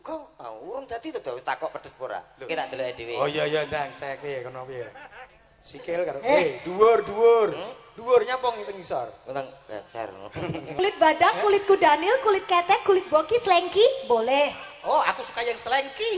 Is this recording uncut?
no; 2 cuts; at 2.4 s, 10.8 s

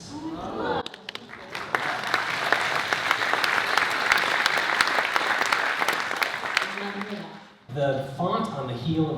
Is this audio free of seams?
no; 1 cut; at 7.6 s

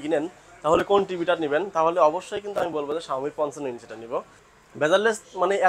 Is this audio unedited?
no; 1 cut; at 4.5 s

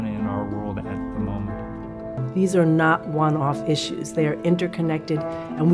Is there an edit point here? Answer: yes; 1 cut; at 2.2 s

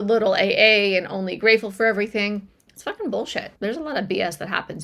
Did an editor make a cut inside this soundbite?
yes; 1 cut; at 3.5 s

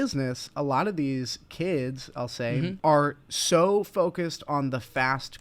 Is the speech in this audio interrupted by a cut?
yes; 1 cut; at 2.8 s

